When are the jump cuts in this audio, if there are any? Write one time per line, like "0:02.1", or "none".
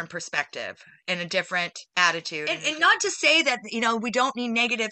0:01.8
0:02.6